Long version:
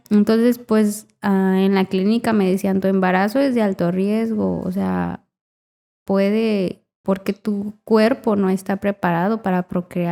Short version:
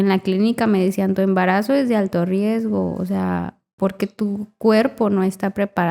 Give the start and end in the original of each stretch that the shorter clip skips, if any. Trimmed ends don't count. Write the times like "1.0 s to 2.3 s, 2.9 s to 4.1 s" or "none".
5.3 s to 6.9 s